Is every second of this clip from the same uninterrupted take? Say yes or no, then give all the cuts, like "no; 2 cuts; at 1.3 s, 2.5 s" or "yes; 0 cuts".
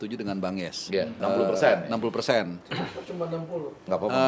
no; 1 cut; at 1.1 s